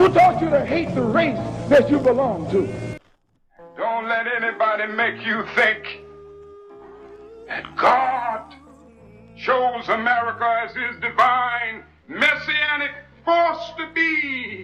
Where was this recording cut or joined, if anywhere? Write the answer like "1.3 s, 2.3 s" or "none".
3.1 s